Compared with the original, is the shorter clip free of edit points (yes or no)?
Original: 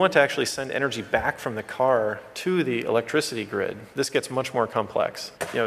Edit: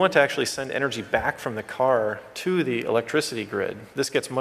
yes